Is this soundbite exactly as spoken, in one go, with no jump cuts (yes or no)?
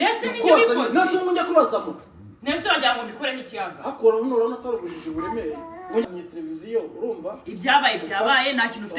no